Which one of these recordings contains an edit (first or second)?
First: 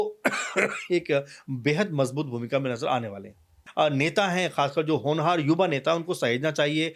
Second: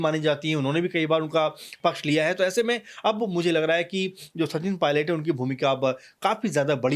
first